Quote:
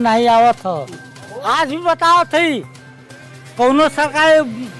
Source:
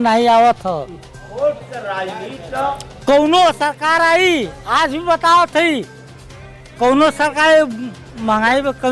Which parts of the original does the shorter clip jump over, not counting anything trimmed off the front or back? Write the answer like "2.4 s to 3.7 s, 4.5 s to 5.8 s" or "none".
1.3 s to 4.5 s